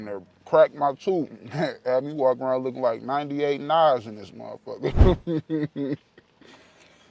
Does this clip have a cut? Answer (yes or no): no